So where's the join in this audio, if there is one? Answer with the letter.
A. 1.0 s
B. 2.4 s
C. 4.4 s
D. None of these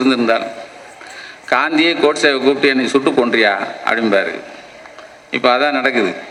D